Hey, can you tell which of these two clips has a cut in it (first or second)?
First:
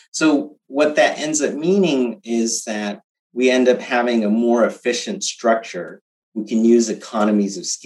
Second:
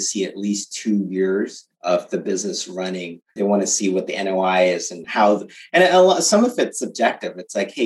second